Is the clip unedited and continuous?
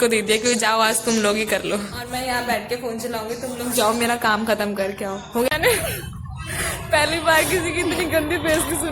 no; 2 cuts; at 2.0 s, 5.5 s

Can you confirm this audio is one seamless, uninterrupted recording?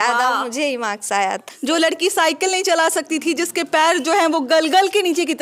no; 1 cut; at 1.5 s

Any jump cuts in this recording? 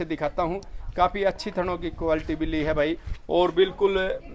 no; 0 cuts

